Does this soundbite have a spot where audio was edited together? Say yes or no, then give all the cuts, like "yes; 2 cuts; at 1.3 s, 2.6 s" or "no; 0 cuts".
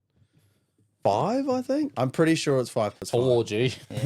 yes; 2 cuts; at 1.9 s, 3.0 s